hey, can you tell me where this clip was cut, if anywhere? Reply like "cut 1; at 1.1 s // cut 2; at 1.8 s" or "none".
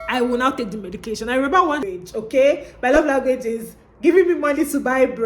cut 1; at 1.8 s